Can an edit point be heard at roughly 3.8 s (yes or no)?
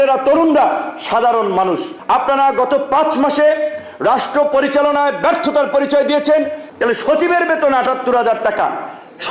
no